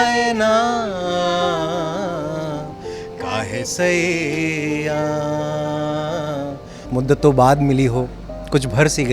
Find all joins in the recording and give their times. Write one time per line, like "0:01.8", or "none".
0:06.8